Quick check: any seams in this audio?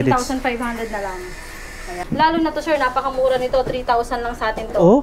yes; 1 cut; at 1.8 s

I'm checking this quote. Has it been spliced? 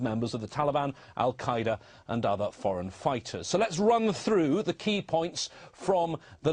yes; 1 cut; at 2.8 s

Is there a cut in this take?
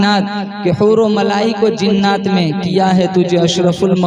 no; 0 cuts

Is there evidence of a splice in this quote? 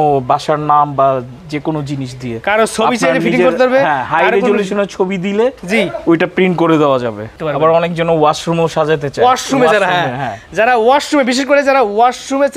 no; 0 cuts

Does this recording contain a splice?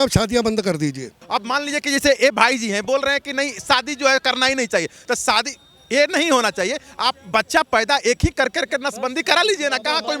yes; 1 cut; at 1.2 s

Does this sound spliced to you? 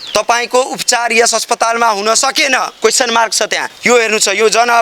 yes; 1 cut; at 3.7 s

